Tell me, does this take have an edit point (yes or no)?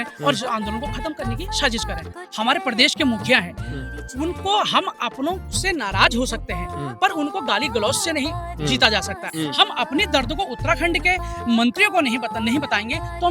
yes